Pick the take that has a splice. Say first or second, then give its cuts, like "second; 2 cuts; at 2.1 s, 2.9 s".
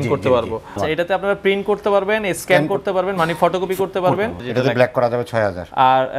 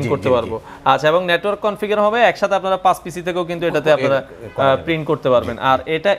first; 2 cuts; at 0.8 s, 4.4 s